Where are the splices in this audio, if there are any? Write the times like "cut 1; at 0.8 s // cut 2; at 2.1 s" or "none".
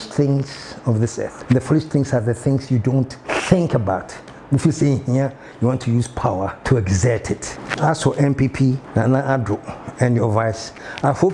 cut 1; at 1.4 s // cut 2; at 3.2 s // cut 3; at 6.6 s // cut 4; at 7.6 s // cut 5; at 8.8 s